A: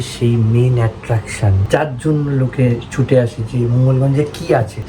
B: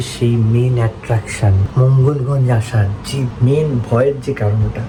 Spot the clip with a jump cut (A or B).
A